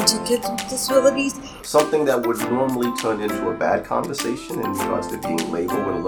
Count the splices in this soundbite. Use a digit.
1